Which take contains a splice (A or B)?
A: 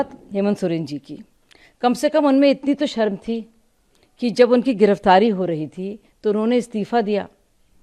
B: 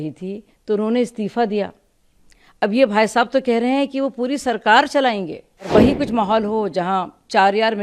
B